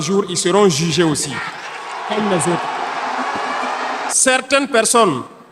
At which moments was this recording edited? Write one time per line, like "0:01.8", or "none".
0:04.1